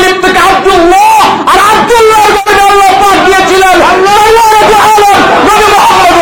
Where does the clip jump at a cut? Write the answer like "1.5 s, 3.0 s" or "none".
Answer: none